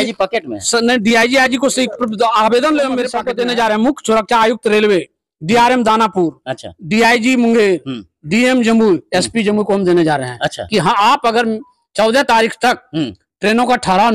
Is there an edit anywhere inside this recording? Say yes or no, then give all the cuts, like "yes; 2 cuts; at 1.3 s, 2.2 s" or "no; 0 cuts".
yes; 1 cut; at 3.2 s